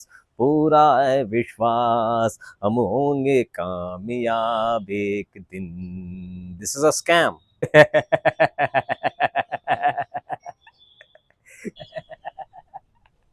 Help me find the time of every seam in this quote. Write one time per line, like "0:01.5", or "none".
0:07.7
0:11.7